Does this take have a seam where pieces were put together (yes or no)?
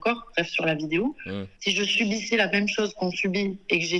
yes